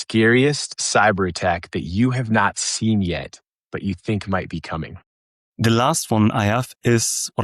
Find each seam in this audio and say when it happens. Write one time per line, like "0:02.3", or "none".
0:04.9